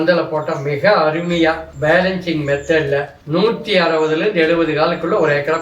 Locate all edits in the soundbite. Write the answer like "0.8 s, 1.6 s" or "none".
1.7 s, 3.2 s